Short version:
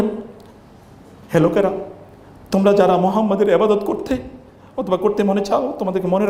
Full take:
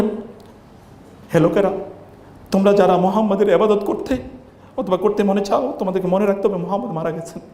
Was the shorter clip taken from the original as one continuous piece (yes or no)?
yes